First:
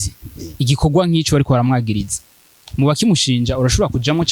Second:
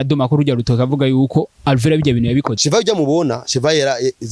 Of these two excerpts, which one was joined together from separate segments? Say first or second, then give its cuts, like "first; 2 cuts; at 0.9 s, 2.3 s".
second; 1 cut; at 2.5 s